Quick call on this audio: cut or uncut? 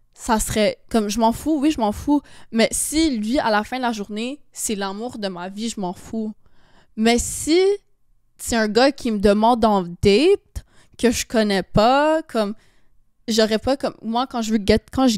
uncut